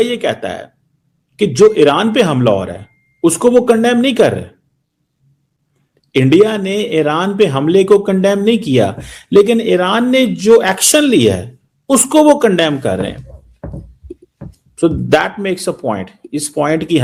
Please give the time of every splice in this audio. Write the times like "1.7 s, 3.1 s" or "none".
none